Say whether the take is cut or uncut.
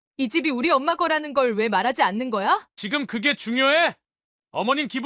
cut